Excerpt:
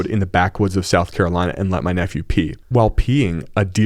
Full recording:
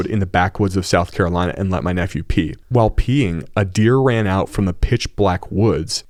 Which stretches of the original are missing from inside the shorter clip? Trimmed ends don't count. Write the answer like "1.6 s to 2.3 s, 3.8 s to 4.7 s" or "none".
none